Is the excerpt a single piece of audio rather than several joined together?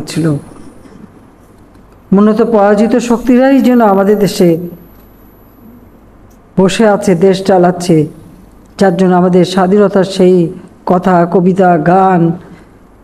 yes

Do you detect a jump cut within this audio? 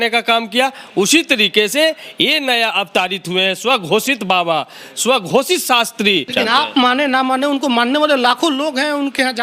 yes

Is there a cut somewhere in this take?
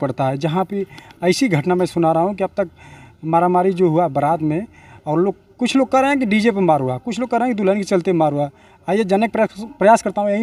no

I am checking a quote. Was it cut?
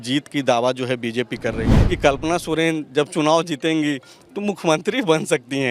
yes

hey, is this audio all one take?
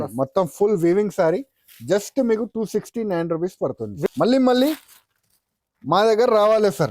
no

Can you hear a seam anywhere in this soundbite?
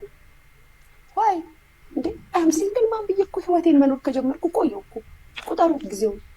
yes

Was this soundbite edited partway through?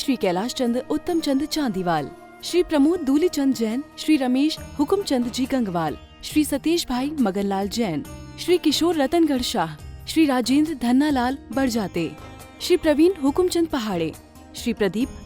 no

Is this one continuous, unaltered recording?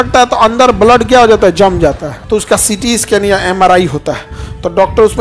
no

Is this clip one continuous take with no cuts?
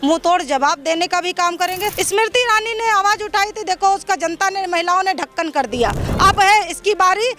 no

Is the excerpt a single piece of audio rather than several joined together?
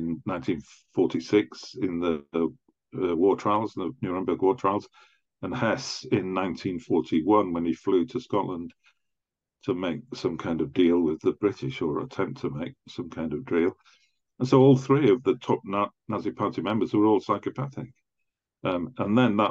yes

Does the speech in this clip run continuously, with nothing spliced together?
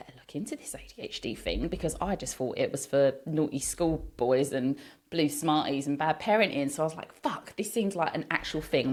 yes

